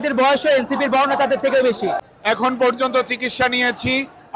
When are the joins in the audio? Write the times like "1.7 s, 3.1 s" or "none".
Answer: 2.1 s

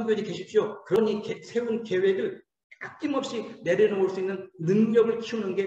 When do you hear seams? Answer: 1.0 s

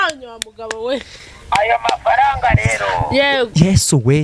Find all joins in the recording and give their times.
none

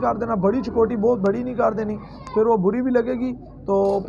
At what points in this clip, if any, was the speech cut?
none

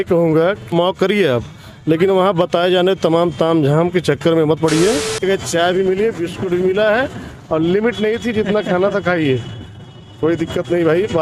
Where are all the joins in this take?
0.7 s, 5.2 s

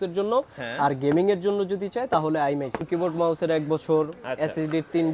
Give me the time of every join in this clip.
2.9 s

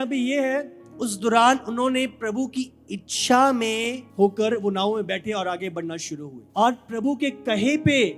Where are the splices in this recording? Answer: 4.0 s, 6.4 s

